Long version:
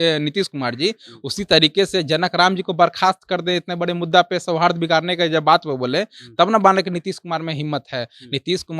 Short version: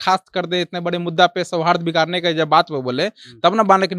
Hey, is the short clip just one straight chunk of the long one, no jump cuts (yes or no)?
yes